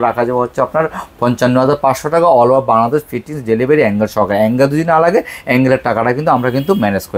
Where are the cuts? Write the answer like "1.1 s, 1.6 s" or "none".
none

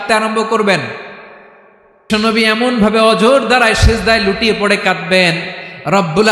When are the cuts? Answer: 2.0 s

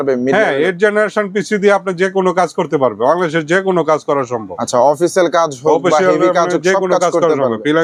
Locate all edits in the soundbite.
none

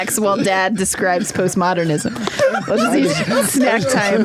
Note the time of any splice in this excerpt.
none

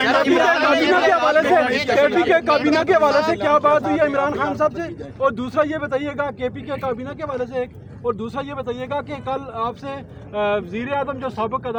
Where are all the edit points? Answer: none

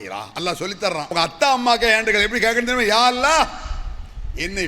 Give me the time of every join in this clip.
1.0 s

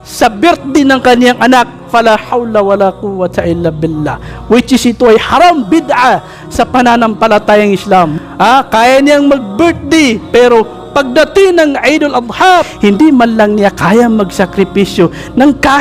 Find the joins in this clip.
8.1 s, 12.7 s

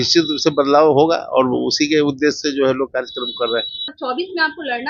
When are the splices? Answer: 3.9 s

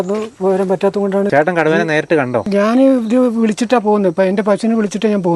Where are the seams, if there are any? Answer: 1.3 s, 2.5 s

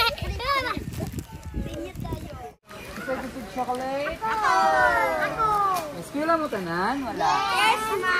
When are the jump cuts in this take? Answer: 2.6 s

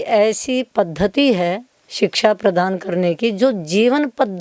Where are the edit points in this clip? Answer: none

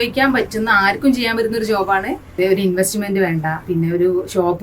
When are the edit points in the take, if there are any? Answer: 2.2 s, 3.6 s

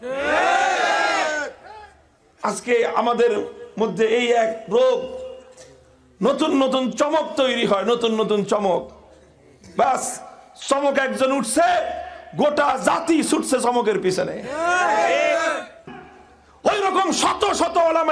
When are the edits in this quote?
15.9 s

